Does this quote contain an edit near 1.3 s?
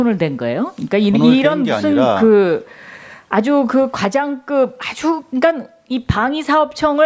yes; 1 cut; at 1.3 s

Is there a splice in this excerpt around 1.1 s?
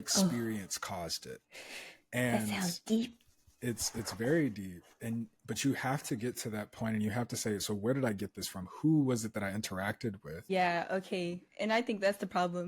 no; 1 cut; at 10.5 s

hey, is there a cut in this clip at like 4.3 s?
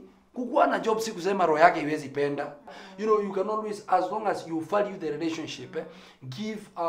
no; 1 cut; at 2.8 s

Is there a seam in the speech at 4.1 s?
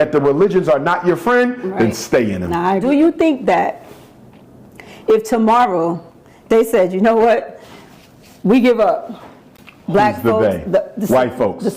no; 1 cut; at 2.8 s

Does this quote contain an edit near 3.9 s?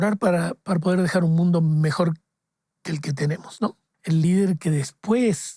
yes; 1 cut; at 3.9 s

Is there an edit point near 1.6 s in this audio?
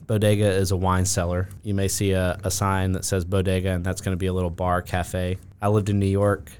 yes; 2 cuts; at 1.6 s, 5.5 s

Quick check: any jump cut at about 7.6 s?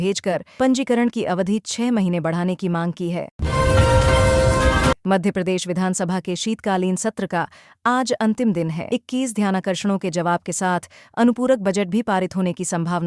no; 2 cuts; at 3.4 s, 5.0 s

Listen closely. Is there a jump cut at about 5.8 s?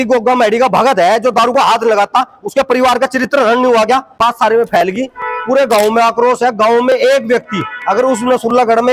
no; 1 cut; at 4.2 s

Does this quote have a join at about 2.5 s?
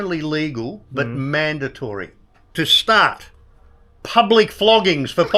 yes; 1 cut; at 2.5 s

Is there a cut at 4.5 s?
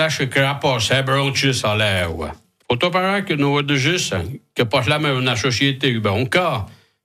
no; 1 cut; at 2.5 s

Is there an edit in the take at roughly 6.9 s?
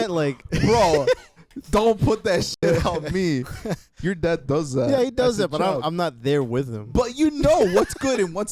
no; 1 cut; at 3.9 s

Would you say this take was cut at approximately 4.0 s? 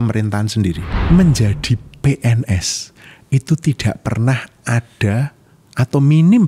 no; 1 cut; at 0.9 s

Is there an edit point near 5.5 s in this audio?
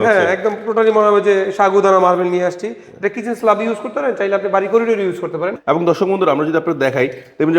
yes; 1 cut; at 5.5 s

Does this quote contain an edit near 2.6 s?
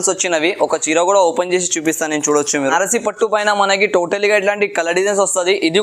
yes; 1 cut; at 2.6 s

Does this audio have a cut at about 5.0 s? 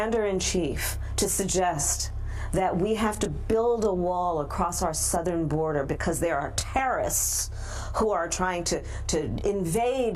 no; 0 cuts

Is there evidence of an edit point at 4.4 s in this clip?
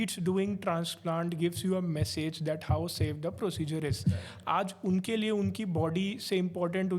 no; 0 cuts

